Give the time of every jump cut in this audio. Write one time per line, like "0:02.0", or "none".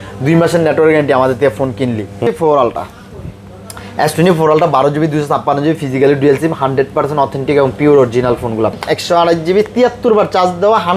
0:02.3
0:08.7